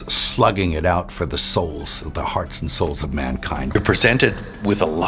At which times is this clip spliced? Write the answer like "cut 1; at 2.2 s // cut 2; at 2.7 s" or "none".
cut 1; at 3.7 s